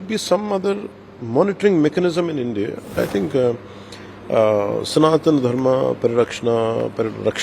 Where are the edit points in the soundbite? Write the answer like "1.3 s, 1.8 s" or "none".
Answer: 3.0 s